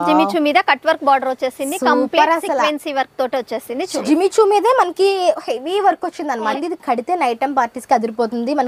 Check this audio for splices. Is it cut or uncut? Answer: cut